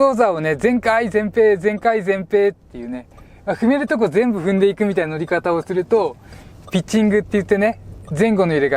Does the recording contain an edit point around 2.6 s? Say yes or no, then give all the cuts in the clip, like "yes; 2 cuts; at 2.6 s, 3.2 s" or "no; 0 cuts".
no; 0 cuts